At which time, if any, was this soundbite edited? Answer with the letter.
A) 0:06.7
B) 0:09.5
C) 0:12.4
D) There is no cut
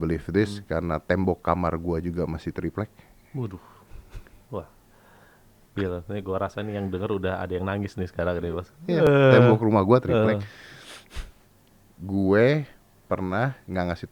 D